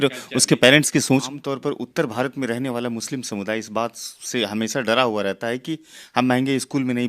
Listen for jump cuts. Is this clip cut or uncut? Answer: cut